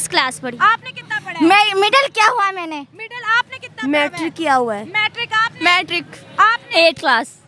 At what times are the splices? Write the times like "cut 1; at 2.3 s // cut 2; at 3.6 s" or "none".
none